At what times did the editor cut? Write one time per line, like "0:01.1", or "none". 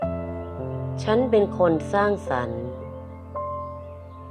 0:01.0